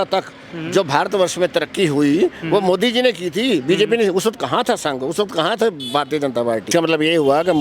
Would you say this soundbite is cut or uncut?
cut